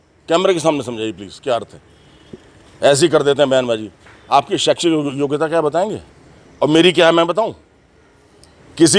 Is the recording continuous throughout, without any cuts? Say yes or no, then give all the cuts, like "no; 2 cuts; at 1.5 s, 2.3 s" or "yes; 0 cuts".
yes; 0 cuts